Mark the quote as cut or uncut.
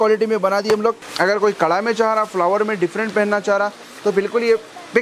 cut